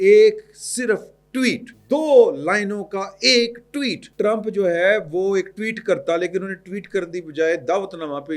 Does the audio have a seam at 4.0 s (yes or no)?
yes